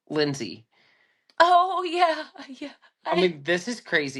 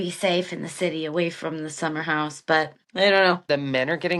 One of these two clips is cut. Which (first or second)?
second